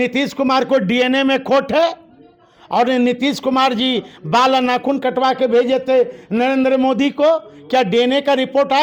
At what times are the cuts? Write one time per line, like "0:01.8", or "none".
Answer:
none